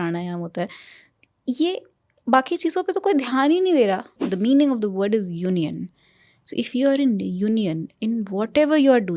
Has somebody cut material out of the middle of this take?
yes; 1 cut; at 4.2 s

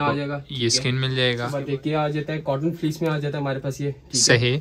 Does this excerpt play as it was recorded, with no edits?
no; 1 cut; at 1.5 s

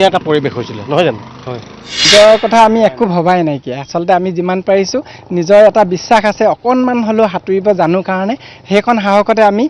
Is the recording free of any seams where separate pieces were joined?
no; 1 cut; at 2.1 s

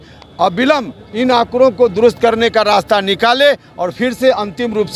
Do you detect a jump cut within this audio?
no; 0 cuts

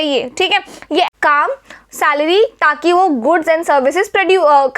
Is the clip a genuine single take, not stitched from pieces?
no; 1 cut; at 1.1 s

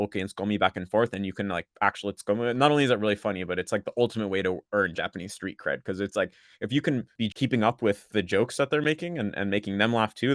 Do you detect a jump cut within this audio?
no; 0 cuts

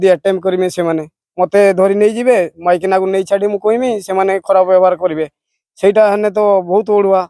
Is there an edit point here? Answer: no; 0 cuts

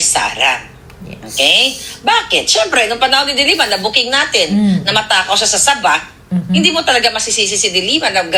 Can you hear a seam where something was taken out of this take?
no; 0 cuts

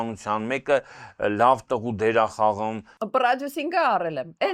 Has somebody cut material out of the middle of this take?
yes; 1 cut; at 2.9 s

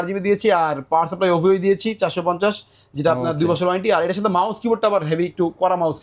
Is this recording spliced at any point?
no; 0 cuts

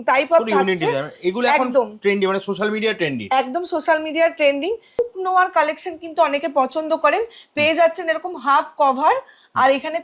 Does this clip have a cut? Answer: yes; 1 cut; at 5.0 s

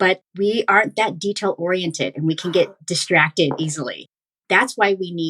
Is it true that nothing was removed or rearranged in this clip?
no; 1 cut; at 4.3 s

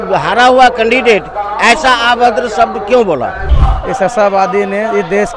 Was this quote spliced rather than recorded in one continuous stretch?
yes; 1 cut; at 3.5 s

